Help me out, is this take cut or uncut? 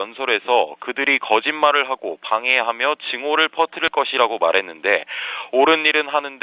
uncut